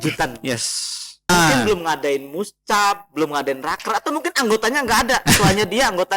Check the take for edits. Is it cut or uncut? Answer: cut